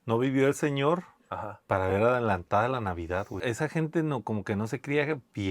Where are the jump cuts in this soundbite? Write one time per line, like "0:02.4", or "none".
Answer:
0:03.4